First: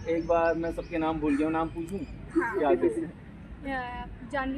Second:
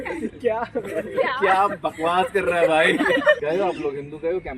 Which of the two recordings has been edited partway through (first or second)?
second